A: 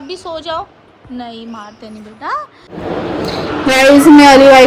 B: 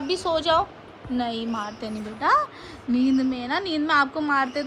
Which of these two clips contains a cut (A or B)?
A